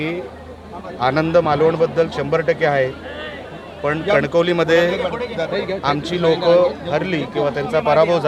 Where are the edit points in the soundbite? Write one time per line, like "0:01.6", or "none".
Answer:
none